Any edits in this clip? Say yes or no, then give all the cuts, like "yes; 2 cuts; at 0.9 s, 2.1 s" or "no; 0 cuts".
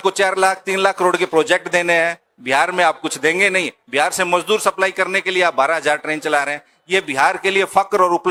no; 0 cuts